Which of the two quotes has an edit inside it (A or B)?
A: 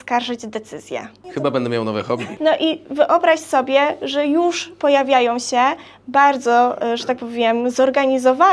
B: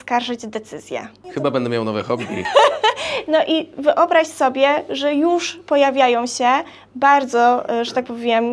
A